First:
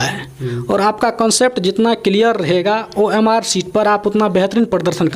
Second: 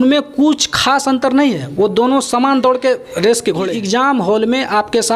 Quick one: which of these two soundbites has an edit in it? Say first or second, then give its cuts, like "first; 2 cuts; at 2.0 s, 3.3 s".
second; 1 cut; at 3.7 s